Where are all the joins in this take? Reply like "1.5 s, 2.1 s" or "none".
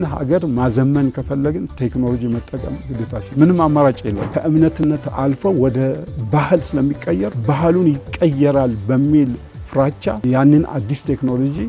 4.3 s, 7.4 s, 10.2 s